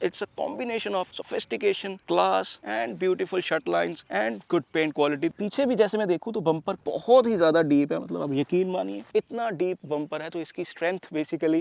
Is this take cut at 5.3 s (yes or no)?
yes